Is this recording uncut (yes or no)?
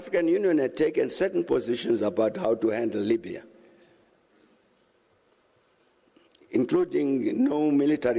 yes